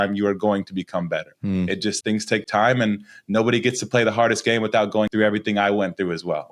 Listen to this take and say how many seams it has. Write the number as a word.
two